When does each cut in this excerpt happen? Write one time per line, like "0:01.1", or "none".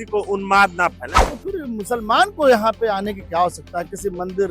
0:01.1